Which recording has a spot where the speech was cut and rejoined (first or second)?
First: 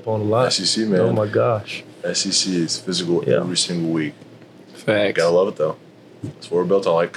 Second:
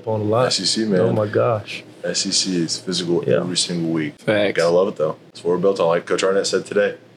second